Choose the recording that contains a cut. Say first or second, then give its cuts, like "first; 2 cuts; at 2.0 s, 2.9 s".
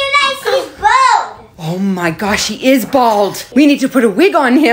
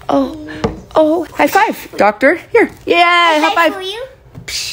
first; 1 cut; at 3.4 s